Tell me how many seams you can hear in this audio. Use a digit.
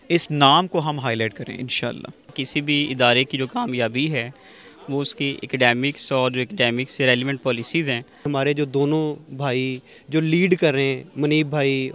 2